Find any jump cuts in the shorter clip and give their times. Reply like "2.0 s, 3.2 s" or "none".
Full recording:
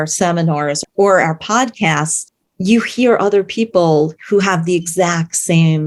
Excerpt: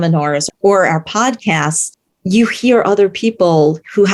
none